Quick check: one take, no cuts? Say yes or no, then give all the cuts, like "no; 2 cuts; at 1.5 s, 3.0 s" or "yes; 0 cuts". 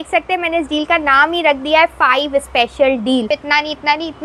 no; 1 cut; at 3.3 s